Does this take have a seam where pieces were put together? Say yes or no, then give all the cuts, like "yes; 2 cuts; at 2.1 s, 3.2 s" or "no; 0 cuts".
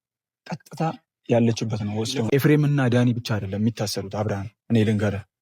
yes; 1 cut; at 2.3 s